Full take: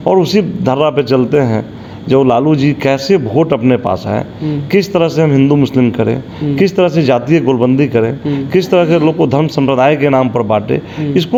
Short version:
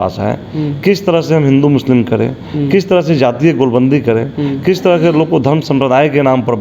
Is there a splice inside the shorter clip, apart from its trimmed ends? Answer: no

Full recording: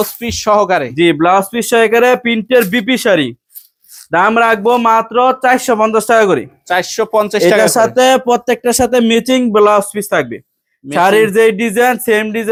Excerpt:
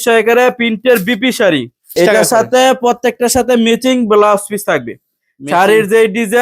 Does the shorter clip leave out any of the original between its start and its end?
yes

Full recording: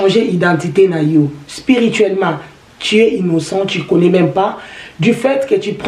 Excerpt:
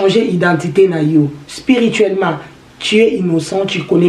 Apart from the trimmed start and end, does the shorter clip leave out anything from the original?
no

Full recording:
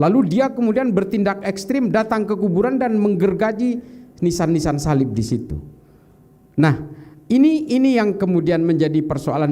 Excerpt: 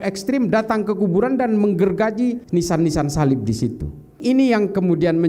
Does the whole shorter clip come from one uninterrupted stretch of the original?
no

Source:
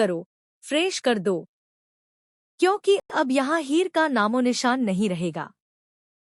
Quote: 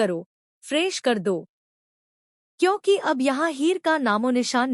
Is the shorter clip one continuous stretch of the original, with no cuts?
no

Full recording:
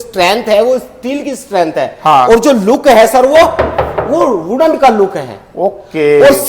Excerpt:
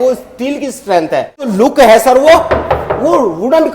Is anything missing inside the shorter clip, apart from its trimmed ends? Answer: yes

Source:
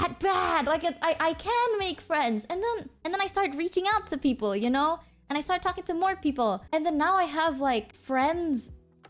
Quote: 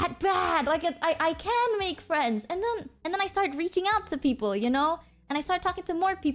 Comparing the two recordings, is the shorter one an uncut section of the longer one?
yes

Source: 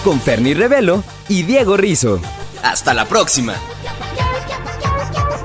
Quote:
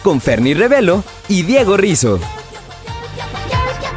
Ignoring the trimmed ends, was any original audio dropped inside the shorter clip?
yes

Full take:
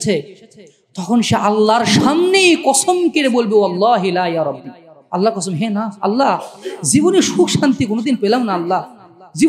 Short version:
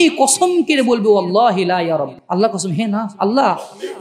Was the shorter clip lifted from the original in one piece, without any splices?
no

